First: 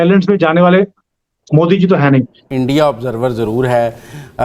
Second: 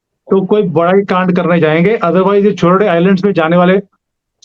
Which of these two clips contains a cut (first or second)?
first